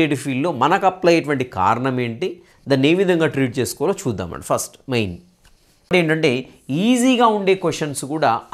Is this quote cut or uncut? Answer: cut